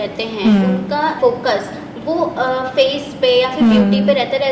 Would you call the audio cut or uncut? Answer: cut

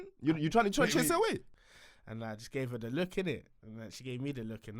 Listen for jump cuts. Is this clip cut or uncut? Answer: cut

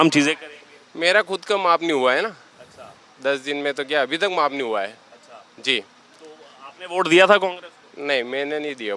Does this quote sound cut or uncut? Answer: uncut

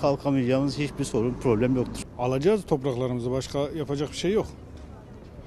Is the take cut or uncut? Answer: cut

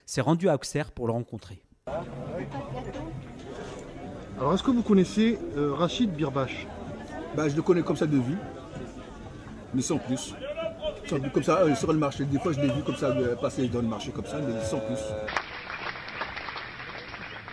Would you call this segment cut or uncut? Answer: uncut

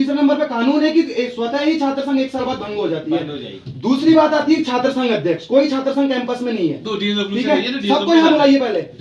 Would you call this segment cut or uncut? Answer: uncut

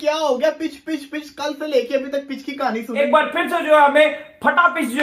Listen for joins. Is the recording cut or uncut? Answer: cut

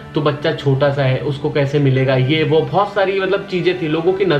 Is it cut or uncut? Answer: uncut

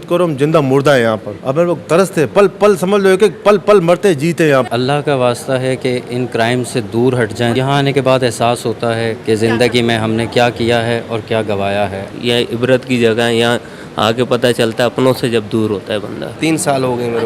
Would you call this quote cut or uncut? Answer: cut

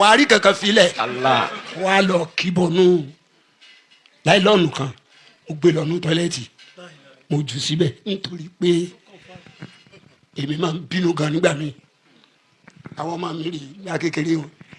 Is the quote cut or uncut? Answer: cut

